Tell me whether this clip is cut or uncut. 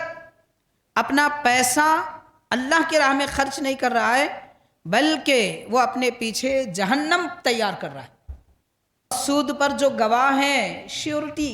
cut